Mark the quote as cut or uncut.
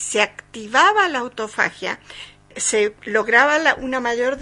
cut